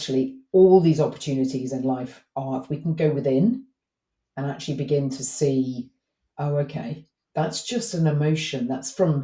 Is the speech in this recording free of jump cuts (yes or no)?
yes